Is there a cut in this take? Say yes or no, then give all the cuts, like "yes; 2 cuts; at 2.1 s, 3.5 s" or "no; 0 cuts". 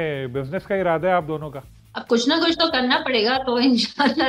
no; 0 cuts